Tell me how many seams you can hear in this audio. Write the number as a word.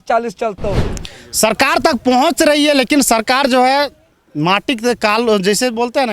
one